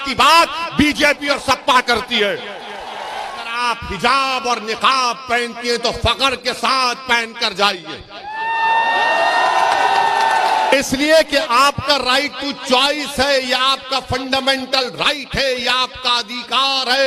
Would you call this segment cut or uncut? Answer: cut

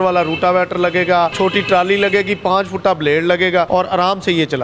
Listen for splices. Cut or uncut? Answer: cut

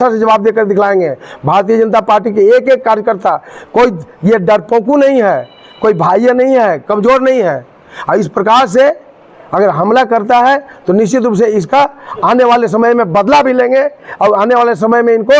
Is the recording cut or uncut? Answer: uncut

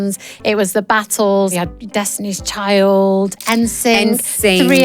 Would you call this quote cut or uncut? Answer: cut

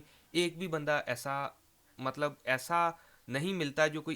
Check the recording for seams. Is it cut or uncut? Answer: uncut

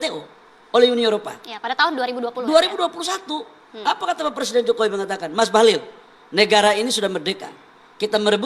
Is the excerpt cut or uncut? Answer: uncut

